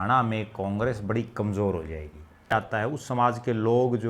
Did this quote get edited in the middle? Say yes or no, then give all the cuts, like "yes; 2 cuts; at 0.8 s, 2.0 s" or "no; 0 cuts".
yes; 1 cut; at 2.5 s